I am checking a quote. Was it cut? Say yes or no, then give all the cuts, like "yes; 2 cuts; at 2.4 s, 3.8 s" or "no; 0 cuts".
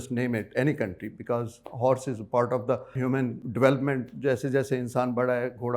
yes; 1 cut; at 3.3 s